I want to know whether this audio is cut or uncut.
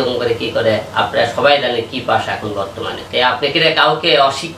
cut